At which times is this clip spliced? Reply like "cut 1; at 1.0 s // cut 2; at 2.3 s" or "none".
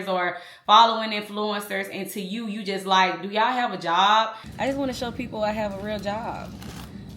cut 1; at 4.4 s

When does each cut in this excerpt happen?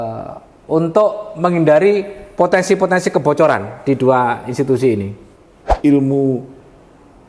cut 1; at 5.7 s

